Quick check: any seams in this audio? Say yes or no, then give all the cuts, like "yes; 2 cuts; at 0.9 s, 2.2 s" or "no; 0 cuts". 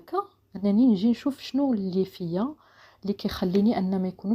no; 0 cuts